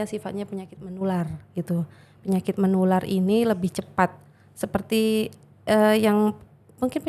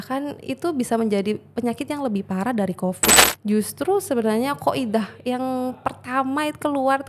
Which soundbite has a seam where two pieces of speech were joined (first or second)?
second